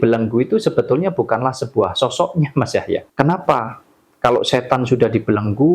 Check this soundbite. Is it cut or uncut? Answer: cut